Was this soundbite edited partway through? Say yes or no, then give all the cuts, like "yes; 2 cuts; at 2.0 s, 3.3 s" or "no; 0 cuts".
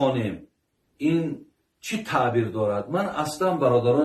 no; 0 cuts